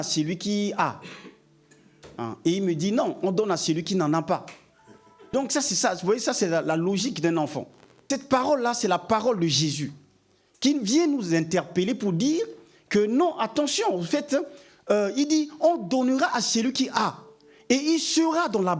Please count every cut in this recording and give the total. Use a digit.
2